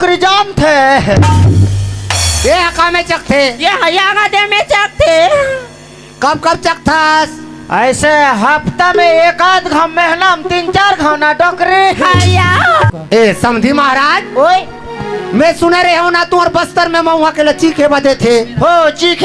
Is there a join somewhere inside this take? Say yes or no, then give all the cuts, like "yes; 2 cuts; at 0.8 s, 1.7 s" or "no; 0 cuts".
yes; 1 cut; at 12.9 s